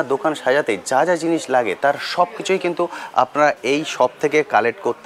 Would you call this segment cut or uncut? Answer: uncut